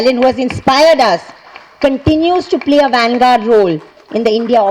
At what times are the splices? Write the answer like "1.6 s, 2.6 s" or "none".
none